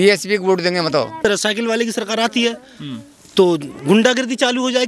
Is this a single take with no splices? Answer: no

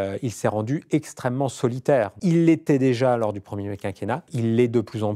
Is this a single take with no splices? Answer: no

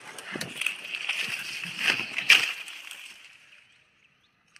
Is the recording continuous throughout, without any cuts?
yes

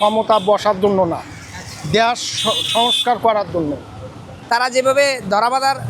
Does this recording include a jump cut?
yes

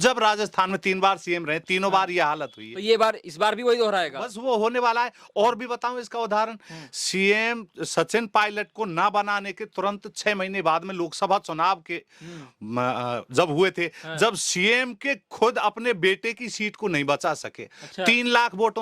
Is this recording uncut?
yes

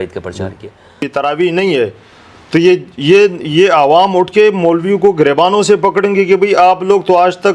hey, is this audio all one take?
no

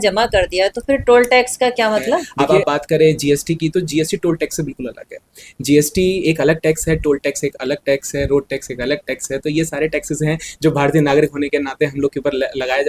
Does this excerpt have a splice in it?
yes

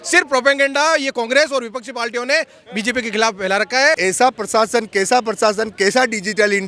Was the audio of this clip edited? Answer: yes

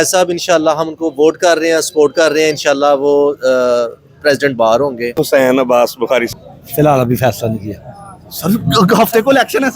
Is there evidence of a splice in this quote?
yes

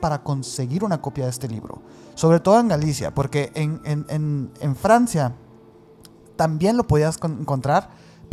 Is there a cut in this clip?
no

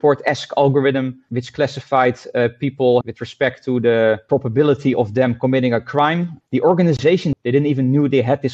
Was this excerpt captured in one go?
no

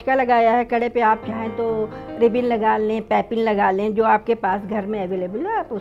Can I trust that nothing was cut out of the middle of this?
yes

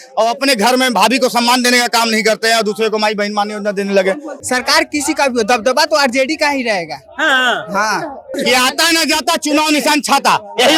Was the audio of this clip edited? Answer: yes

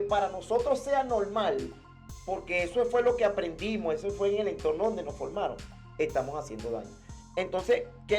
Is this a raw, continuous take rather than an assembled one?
yes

